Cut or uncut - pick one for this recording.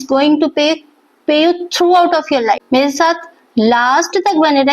cut